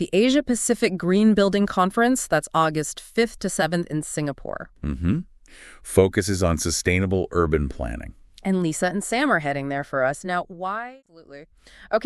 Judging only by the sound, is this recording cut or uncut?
cut